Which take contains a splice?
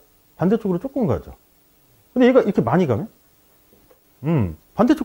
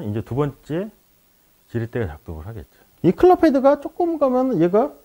second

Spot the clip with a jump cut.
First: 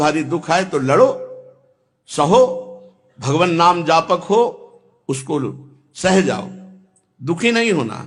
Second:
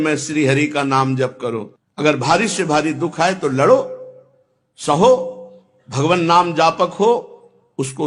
second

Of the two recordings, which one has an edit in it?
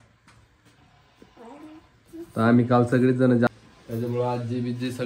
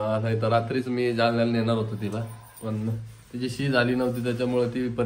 first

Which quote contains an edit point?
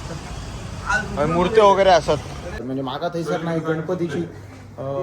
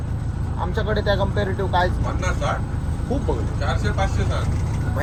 first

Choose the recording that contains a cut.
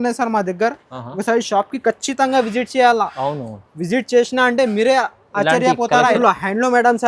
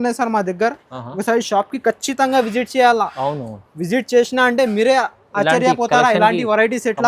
first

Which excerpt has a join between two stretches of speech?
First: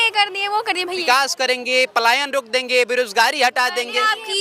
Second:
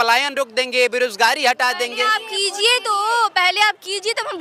first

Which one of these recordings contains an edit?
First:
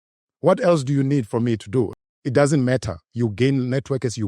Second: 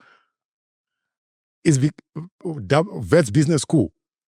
first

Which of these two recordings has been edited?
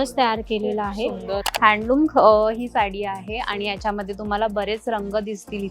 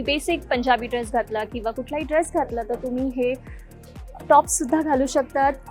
first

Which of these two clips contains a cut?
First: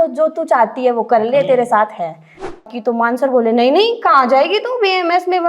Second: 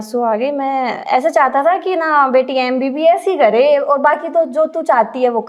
first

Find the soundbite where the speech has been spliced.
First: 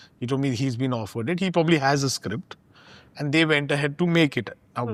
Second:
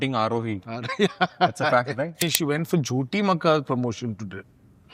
second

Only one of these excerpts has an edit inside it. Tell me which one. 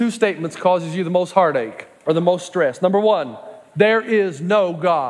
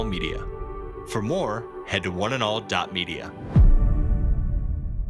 first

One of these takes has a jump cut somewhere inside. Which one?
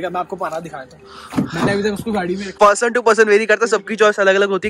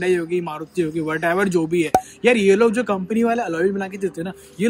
first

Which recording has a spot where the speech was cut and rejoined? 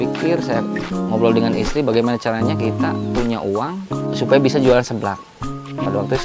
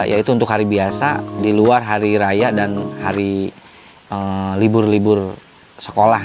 first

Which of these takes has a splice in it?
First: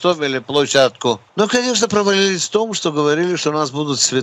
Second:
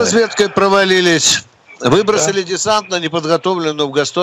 first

